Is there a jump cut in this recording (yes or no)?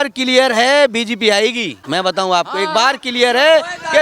yes